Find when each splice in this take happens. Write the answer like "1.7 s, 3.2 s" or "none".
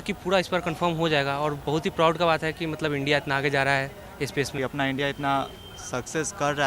4.5 s